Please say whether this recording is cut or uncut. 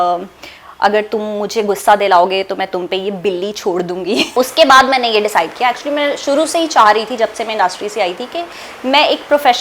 cut